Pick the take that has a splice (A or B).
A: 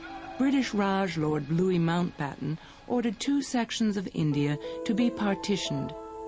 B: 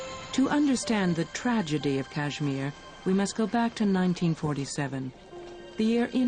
B